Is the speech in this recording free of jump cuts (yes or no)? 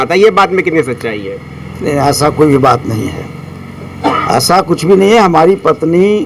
yes